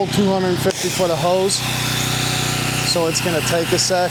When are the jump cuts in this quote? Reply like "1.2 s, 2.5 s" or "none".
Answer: none